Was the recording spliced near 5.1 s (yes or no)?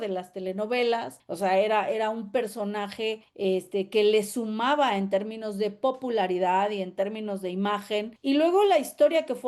no